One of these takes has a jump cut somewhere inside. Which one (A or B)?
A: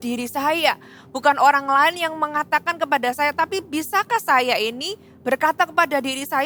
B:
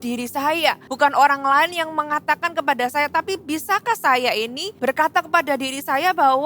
B